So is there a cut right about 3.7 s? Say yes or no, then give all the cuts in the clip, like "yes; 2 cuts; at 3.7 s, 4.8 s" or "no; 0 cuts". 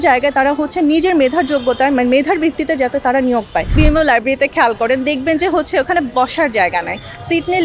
yes; 1 cut; at 3.7 s